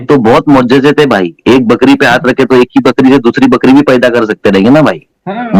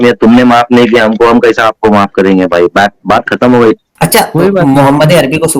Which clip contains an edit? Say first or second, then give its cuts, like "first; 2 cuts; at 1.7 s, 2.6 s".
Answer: second; 1 cut; at 3.9 s